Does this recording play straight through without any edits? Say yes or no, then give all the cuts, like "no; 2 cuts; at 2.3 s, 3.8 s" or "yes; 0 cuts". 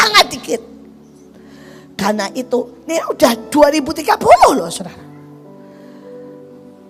yes; 0 cuts